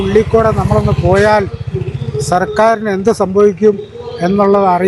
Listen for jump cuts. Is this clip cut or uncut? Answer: uncut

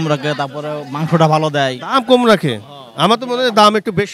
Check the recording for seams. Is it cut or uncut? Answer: uncut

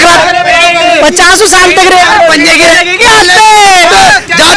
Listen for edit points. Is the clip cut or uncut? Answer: cut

